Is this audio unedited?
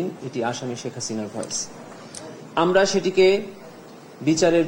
yes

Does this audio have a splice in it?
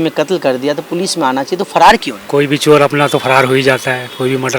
yes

